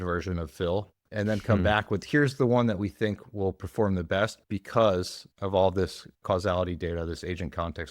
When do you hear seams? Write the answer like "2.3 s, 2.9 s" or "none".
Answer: 1.1 s, 6.2 s